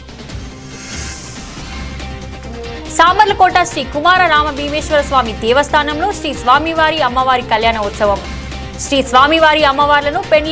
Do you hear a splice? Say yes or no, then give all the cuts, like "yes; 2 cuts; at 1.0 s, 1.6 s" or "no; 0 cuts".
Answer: no; 0 cuts